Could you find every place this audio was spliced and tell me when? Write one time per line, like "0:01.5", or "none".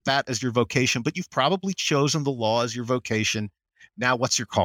none